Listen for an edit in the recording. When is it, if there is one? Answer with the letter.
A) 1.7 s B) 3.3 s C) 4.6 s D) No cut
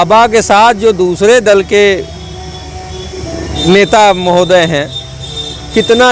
D